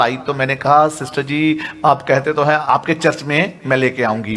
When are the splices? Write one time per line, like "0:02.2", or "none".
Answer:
0:02.6